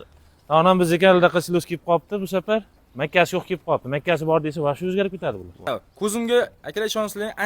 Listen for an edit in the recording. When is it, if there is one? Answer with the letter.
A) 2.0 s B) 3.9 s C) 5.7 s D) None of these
C